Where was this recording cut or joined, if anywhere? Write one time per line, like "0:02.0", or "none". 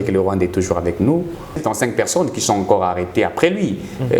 0:01.6